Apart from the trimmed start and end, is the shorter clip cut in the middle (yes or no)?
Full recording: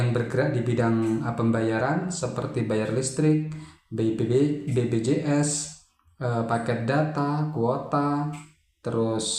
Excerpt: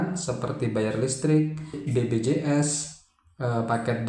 yes